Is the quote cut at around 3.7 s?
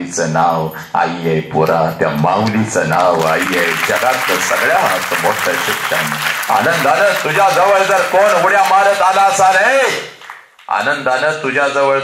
no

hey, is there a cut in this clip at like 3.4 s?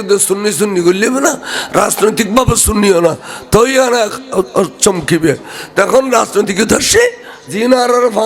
no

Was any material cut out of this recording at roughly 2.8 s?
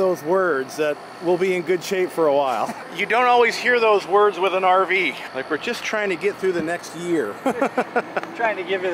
yes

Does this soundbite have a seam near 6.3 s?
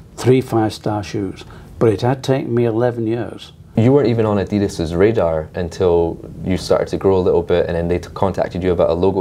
no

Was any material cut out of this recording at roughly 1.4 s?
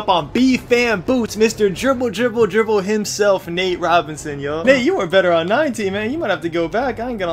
no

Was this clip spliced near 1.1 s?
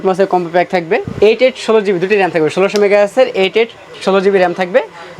yes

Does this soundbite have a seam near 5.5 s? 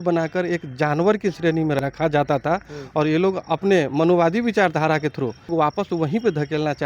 yes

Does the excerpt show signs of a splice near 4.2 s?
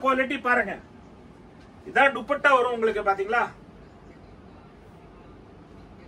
no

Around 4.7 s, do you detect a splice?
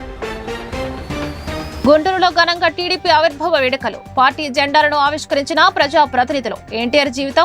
no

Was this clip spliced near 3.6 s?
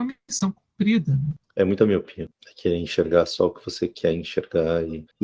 no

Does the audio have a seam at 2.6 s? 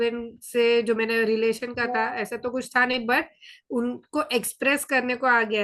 no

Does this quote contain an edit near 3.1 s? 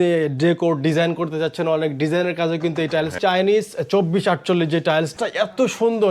yes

